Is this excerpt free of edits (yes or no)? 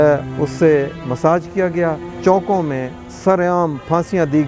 no